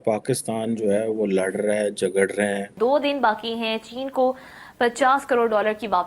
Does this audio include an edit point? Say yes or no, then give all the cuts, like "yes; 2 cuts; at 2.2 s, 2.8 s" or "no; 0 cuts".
yes; 1 cut; at 2.7 s